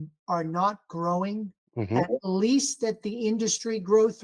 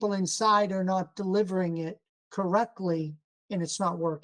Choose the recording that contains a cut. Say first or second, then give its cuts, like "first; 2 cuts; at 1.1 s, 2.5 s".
first; 1 cut; at 1.6 s